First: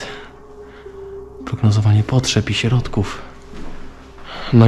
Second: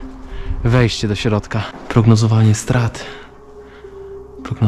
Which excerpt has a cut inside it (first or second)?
second